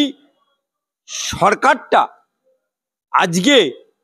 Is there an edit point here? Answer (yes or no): no